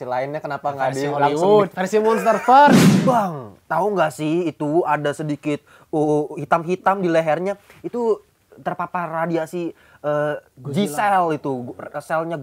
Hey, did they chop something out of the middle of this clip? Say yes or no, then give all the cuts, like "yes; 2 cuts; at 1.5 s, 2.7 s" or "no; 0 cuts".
yes; 1 cut; at 2.9 s